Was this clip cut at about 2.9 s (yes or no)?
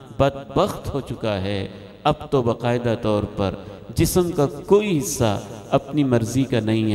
no